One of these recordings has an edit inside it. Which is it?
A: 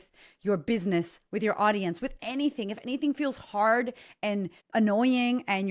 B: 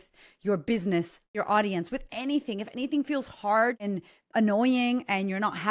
B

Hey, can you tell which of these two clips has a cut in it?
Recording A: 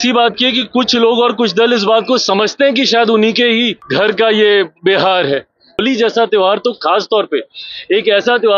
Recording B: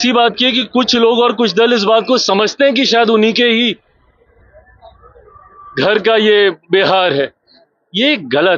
A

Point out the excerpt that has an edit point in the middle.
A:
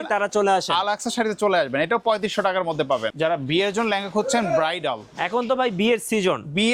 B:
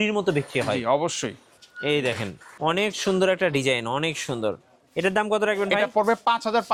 A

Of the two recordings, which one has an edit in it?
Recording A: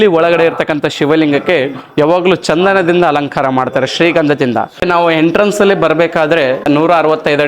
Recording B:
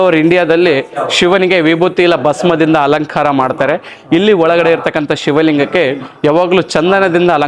A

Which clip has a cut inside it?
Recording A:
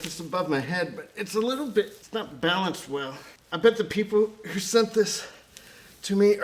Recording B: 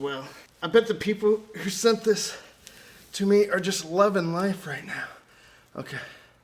A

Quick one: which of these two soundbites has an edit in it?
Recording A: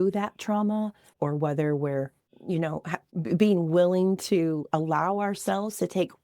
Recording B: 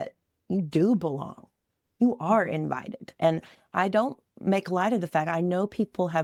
A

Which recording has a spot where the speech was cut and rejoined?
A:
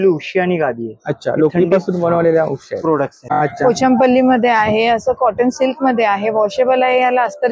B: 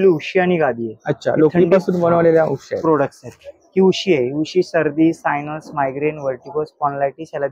A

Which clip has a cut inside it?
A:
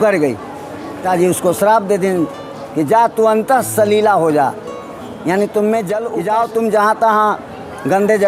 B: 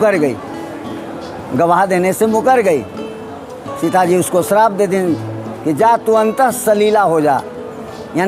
A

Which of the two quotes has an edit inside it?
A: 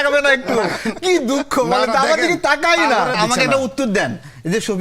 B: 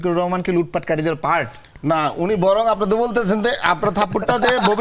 A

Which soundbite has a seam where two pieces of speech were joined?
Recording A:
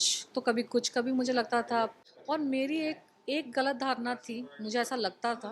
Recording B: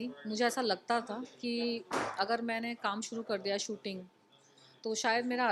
A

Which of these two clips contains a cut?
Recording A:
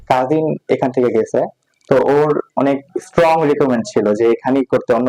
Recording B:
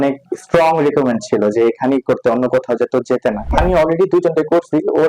B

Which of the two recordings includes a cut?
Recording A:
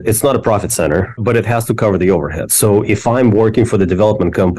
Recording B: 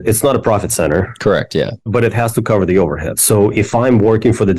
A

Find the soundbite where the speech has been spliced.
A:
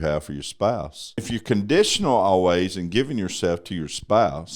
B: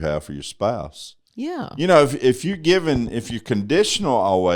A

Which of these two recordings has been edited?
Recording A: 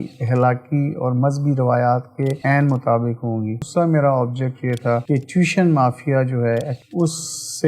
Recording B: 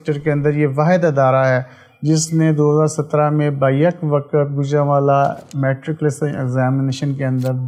A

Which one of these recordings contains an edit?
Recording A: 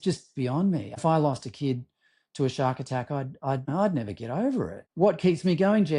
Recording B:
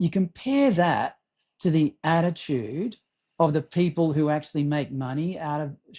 A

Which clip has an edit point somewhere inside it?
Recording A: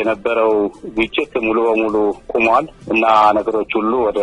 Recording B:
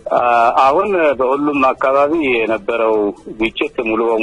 A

